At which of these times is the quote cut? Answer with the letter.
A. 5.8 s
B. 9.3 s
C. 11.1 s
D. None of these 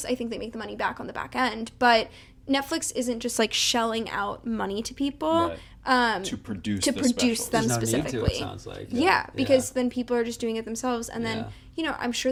D